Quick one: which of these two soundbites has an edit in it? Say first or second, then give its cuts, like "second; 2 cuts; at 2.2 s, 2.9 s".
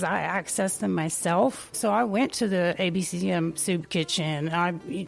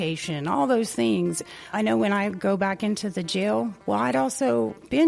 second; 2 cuts; at 1.4 s, 3.8 s